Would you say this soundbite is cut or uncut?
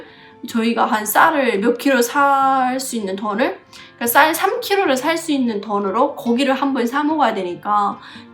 uncut